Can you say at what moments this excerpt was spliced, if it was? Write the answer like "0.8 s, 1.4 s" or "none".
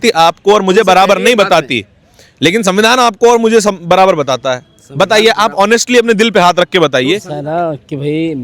7.3 s